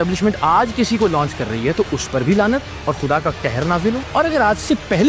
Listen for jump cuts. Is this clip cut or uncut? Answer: cut